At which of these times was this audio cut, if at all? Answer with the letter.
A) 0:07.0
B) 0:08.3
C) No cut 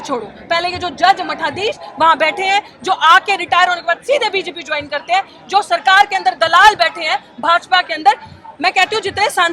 C